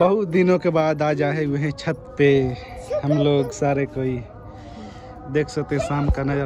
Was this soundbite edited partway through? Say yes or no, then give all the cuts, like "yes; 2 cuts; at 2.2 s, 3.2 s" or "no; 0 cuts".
no; 0 cuts